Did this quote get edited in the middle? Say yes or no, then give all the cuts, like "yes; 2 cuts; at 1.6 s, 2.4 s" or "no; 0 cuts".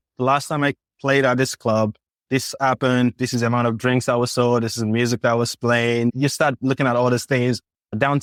no; 0 cuts